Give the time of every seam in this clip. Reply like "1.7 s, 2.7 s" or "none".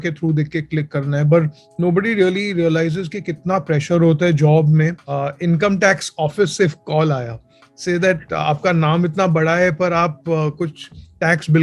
5.0 s

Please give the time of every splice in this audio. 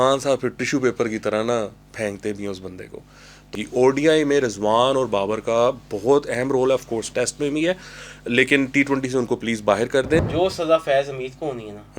3.5 s, 10.2 s

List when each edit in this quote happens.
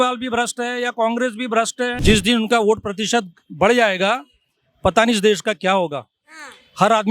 1.9 s

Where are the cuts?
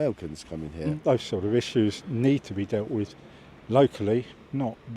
1.0 s

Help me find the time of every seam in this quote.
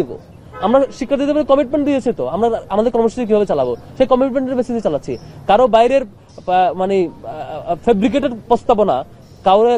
none

